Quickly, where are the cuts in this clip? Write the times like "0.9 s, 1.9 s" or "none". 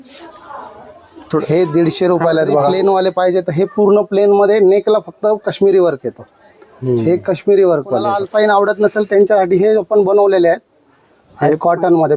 2.7 s, 8.0 s